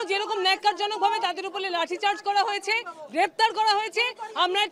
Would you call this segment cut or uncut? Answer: uncut